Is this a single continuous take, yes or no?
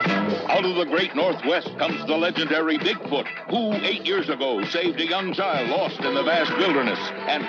yes